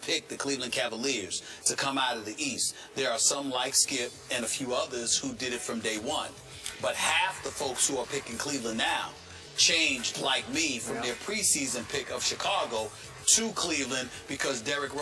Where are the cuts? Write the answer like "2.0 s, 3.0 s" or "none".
11.7 s

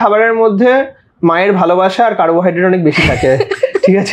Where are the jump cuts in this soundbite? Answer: none

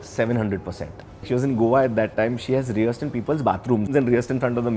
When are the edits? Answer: 1.2 s, 3.9 s

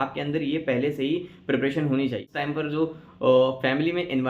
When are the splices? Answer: 2.3 s

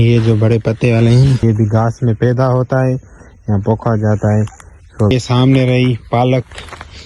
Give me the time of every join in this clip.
1.4 s, 5.1 s

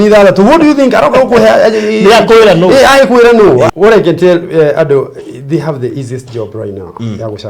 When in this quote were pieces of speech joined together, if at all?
3.7 s

